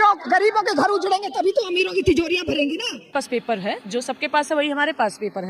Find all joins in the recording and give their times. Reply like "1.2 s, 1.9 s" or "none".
3.1 s